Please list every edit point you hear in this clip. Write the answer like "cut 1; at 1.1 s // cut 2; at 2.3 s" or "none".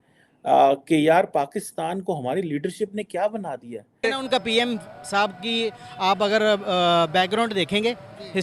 cut 1; at 4.0 s